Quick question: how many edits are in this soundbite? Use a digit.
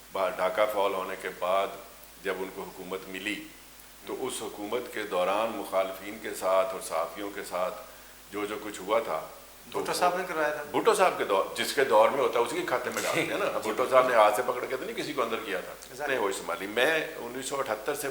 1